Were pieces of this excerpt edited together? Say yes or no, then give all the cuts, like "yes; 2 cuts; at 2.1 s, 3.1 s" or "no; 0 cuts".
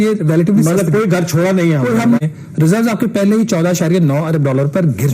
yes; 1 cut; at 2.2 s